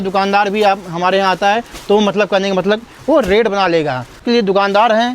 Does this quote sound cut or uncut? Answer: cut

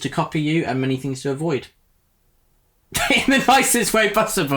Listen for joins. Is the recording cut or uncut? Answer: uncut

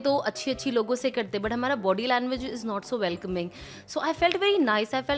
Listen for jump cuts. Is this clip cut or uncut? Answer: uncut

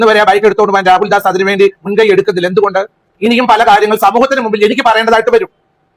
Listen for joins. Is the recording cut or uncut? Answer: cut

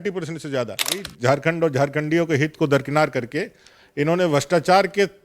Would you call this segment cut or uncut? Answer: cut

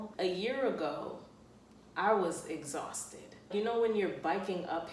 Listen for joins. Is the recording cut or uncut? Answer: cut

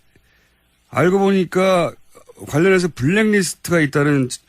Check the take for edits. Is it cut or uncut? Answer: cut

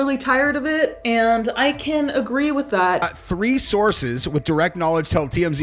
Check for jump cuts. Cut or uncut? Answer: cut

